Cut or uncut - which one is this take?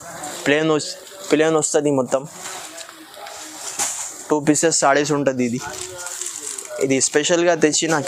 uncut